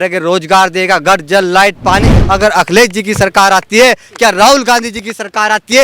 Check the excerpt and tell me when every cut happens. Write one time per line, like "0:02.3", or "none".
0:02.1